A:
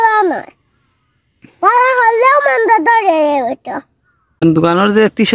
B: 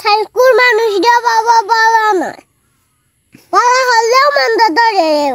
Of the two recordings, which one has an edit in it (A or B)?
A